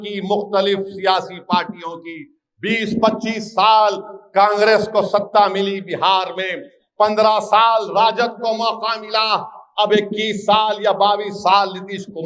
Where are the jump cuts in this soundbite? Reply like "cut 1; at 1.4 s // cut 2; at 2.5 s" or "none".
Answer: none